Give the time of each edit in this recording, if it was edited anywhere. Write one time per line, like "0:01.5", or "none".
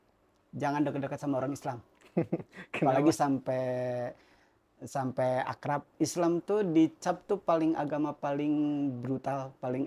0:05.9